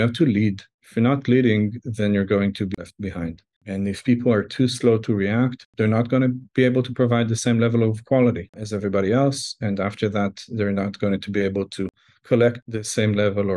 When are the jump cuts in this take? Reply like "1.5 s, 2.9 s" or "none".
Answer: 3.5 s, 5.6 s